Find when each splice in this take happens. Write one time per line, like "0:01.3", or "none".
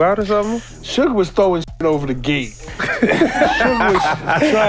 none